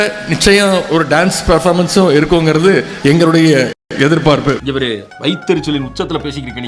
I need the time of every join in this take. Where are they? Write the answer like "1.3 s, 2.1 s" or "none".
none